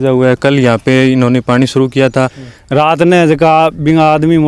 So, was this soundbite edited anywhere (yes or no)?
yes